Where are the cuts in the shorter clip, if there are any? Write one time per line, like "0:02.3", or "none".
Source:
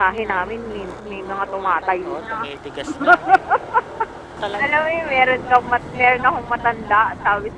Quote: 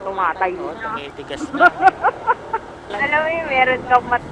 0:02.8